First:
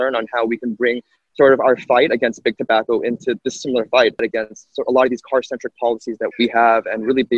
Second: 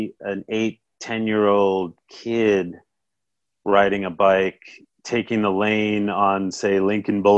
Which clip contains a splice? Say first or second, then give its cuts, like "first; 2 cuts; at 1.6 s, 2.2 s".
first; 2 cuts; at 4.2 s, 6.3 s